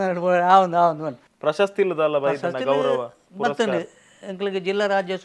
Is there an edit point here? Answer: yes; 1 cut; at 1.2 s

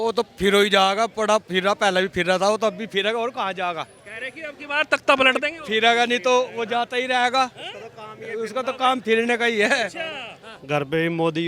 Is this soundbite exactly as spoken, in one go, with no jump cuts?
no; 1 cut; at 10.3 s

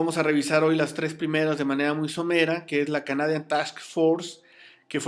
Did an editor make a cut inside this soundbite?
no; 0 cuts

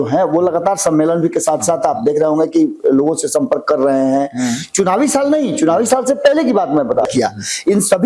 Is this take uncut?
no; 1 cut; at 7.1 s

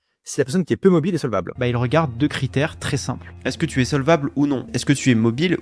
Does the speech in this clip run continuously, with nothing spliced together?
no; 2 cuts; at 1.5 s, 4.7 s

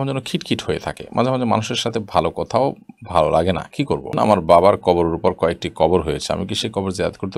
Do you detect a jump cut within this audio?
yes; 1 cut; at 4.1 s

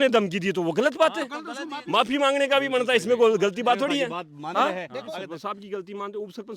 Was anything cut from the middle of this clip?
yes; 2 cuts; at 1.7 s, 5.1 s

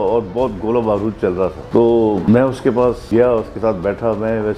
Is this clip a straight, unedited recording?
no; 3 cuts; at 1.6 s, 2.2 s, 3.0 s

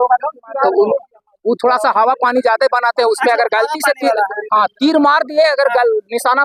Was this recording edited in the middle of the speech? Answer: no; 0 cuts

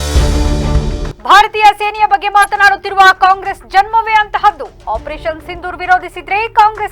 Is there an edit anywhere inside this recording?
yes; 1 cut; at 1.1 s

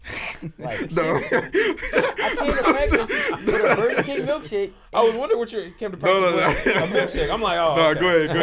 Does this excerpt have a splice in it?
no; 0 cuts

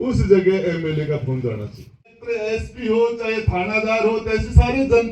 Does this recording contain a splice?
yes; 1 cut; at 2.2 s

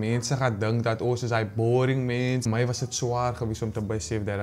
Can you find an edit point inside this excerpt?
yes; 1 cut; at 2.4 s

